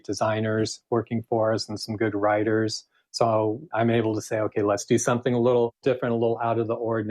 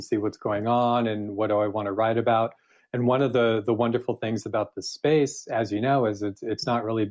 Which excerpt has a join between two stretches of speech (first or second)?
first